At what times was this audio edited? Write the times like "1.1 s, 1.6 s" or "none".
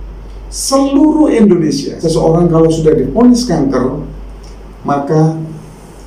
1.9 s